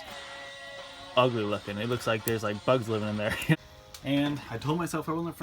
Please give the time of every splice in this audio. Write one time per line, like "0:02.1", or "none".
0:03.5